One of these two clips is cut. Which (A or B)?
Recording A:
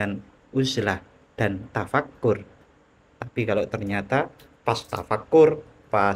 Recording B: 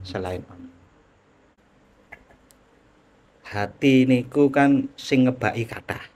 B